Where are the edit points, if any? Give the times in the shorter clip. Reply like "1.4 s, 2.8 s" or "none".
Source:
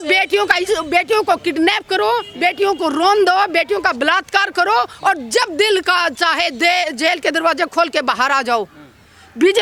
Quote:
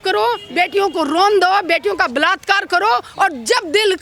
none